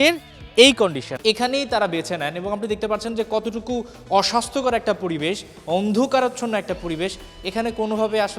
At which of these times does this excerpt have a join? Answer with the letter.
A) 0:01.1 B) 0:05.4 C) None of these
A